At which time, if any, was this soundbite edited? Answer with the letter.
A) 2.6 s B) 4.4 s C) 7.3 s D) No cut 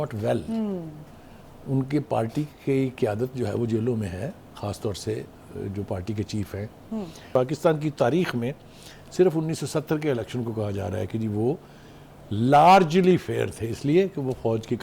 C